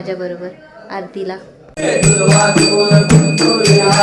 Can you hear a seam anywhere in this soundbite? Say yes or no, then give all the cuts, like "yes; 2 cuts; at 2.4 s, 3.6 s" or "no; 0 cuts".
yes; 1 cut; at 1.8 s